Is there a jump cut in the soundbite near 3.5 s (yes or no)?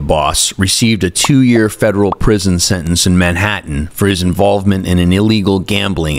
no